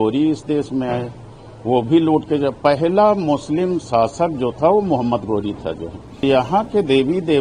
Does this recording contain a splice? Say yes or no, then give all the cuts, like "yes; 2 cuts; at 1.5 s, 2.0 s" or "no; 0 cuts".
yes; 1 cut; at 6.2 s